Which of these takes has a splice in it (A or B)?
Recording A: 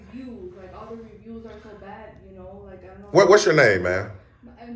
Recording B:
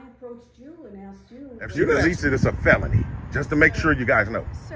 B